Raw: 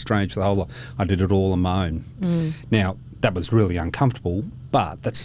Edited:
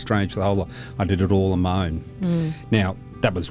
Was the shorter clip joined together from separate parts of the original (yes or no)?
no